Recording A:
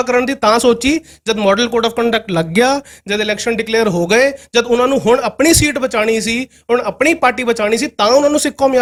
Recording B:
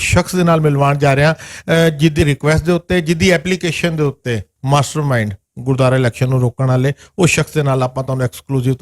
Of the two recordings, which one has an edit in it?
B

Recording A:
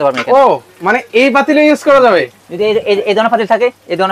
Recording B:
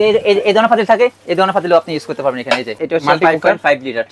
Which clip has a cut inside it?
B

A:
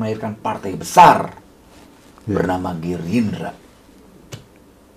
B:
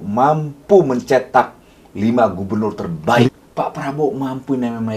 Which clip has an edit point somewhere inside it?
B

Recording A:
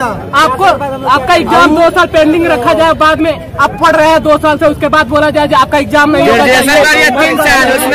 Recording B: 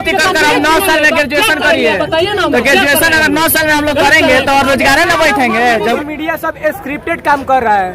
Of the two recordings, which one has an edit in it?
B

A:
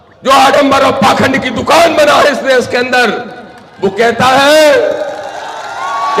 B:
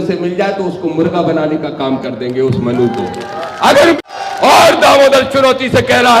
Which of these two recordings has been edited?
B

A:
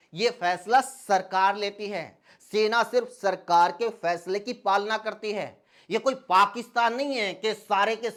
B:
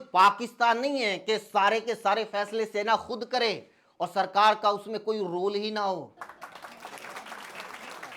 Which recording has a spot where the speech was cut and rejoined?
B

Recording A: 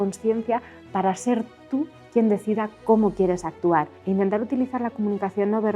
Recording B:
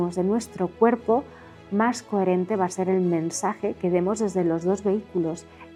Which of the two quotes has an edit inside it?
A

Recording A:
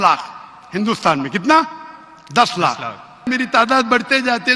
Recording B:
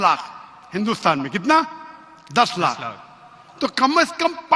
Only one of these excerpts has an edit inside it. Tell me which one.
A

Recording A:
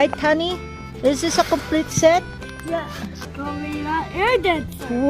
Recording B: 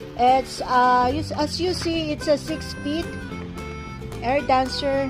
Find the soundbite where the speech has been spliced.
A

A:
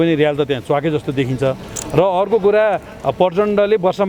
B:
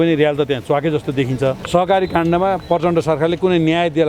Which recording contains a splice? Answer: B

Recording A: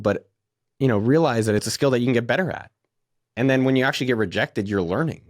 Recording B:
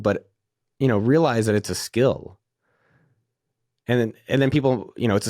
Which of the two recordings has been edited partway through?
A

